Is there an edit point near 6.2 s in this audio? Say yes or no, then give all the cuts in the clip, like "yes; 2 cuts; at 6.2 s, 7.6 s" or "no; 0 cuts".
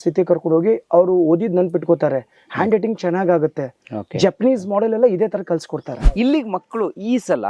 yes; 1 cut; at 6.2 s